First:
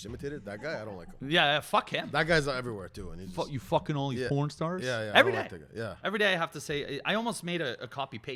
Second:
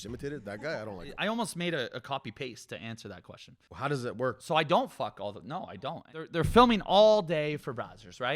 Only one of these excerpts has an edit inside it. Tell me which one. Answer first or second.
second